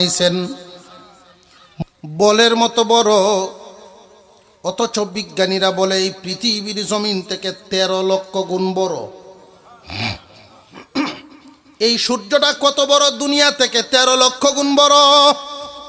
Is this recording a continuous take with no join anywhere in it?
no; 1 cut; at 1.8 s

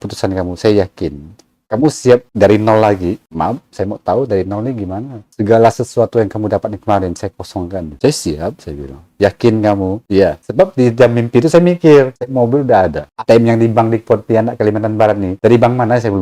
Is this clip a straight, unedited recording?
yes; 0 cuts

